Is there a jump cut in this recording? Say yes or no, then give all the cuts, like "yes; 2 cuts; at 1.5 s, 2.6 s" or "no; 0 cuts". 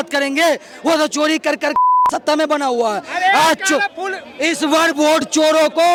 no; 0 cuts